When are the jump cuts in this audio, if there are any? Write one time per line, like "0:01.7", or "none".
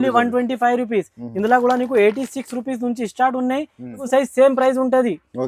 0:04.0